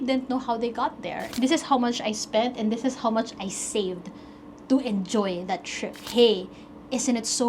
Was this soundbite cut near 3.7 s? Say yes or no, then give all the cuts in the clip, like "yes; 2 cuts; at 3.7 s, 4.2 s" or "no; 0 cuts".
no; 2 cuts; at 1.2 s, 5.9 s